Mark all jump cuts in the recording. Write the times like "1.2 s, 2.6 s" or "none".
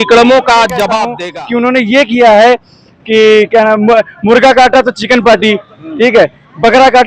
1.2 s